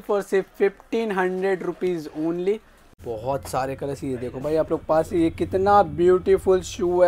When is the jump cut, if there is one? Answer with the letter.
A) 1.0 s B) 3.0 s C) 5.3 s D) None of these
B